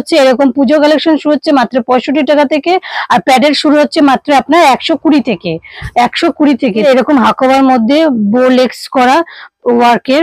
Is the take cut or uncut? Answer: cut